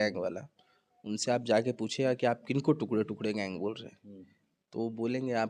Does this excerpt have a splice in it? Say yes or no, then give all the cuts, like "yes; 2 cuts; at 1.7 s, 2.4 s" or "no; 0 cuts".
no; 0 cuts